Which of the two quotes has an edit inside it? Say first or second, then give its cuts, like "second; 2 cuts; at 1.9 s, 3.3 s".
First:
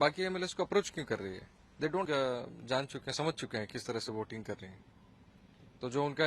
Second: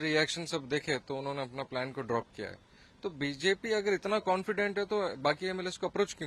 first; 1 cut; at 2.0 s